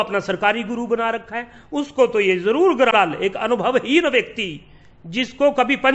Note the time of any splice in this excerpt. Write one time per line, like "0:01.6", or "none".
0:02.9